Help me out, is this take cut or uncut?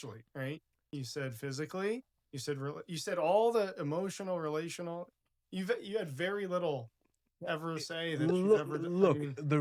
uncut